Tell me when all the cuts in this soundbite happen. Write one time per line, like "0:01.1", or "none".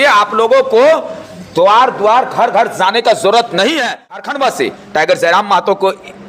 0:04.6

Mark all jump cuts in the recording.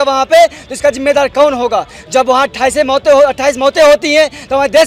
none

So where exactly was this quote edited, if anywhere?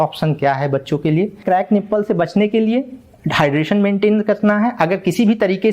0:01.4

